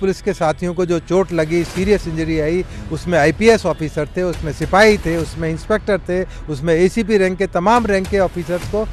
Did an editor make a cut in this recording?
no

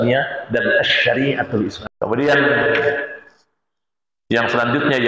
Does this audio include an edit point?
yes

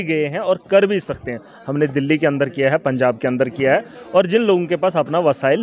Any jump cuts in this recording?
no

